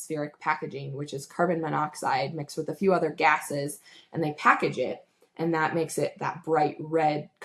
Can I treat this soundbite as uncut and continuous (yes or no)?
yes